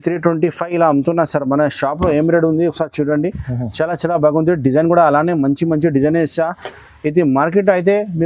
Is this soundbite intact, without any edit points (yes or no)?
yes